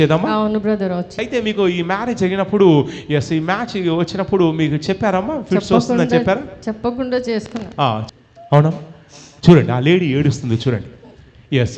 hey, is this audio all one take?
no; 2 cuts; at 1.2 s, 8.0 s

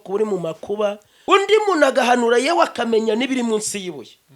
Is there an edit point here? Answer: yes; 1 cut; at 1.1 s

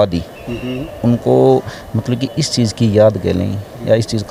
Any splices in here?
no; 0 cuts

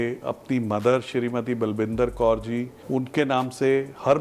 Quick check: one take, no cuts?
no; 1 cut; at 2.7 s

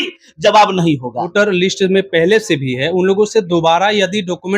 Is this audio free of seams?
no; 1 cut; at 1.3 s

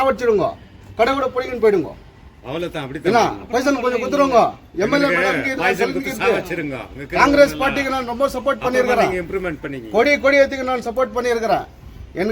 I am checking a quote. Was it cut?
no; 0 cuts

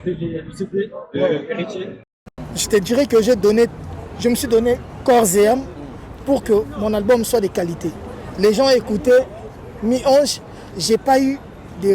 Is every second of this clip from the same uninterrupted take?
no; 1 cut; at 2.1 s

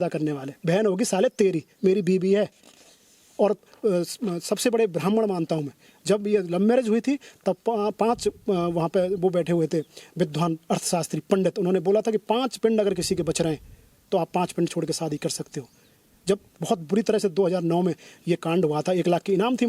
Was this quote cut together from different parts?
no; 0 cuts

